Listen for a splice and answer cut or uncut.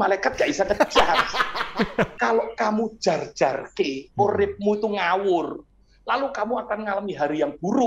cut